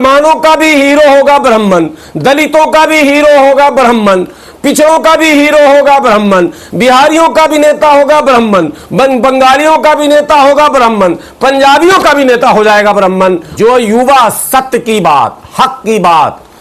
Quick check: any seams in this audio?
yes; 1 cut; at 13.5 s

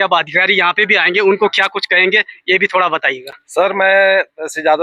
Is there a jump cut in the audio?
no; 0 cuts

